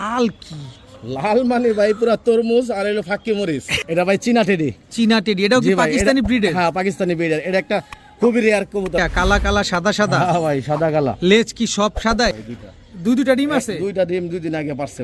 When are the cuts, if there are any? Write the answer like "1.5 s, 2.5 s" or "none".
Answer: 3.8 s, 9.0 s, 12.3 s